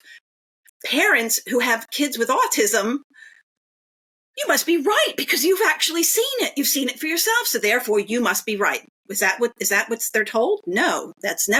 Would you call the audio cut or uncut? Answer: uncut